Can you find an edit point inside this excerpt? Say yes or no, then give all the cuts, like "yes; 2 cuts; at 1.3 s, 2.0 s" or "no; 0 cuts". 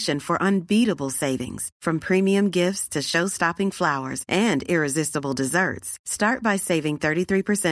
no; 0 cuts